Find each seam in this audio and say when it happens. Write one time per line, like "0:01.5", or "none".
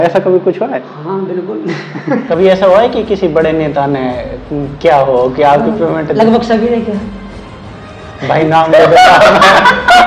0:02.2